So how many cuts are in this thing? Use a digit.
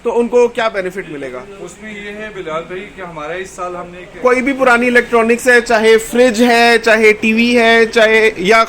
1